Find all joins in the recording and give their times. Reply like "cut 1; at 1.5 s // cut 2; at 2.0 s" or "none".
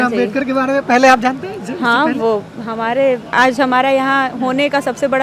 none